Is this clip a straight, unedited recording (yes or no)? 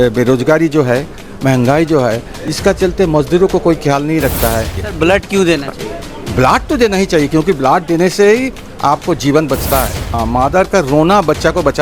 no